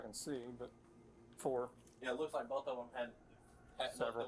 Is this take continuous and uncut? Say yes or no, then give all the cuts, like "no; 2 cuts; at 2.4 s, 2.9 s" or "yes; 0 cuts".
no; 1 cut; at 1.9 s